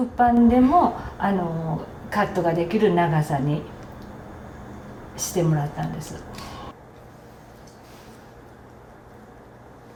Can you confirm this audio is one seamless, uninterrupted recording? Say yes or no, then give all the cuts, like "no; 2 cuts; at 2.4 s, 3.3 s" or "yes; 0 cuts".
yes; 0 cuts